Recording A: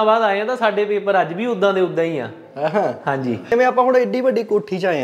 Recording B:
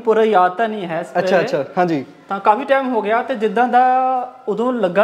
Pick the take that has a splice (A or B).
A